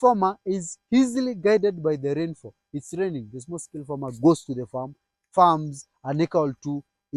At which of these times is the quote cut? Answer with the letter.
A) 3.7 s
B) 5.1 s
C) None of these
C